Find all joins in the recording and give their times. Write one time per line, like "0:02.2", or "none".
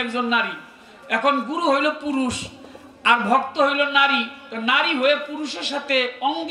none